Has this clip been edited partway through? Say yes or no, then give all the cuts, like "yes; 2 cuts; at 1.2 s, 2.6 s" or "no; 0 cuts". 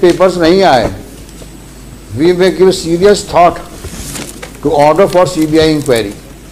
no; 0 cuts